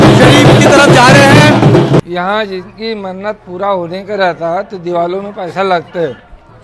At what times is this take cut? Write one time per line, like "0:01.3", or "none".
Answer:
0:02.0